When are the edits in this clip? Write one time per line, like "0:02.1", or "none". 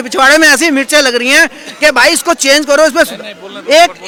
none